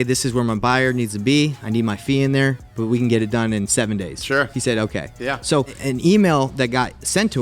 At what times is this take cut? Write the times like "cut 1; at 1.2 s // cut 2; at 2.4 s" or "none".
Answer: cut 1; at 5.7 s